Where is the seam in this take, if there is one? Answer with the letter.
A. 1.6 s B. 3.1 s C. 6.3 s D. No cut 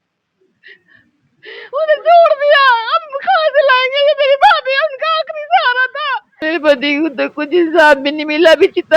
C